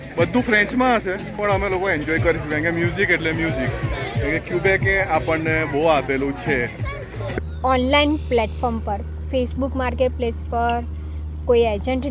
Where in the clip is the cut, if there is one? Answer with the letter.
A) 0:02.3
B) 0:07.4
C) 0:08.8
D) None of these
B